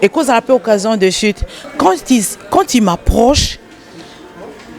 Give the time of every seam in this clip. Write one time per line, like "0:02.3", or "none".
0:01.5